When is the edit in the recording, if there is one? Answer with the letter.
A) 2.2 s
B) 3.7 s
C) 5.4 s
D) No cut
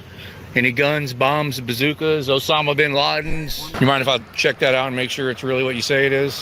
B